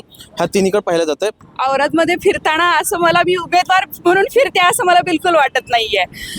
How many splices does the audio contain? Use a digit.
1